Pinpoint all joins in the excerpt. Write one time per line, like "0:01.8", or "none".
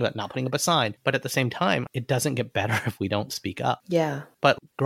0:01.0
0:03.9